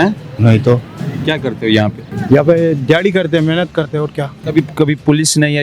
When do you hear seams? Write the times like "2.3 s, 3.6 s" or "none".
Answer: 1.1 s, 2.1 s, 4.4 s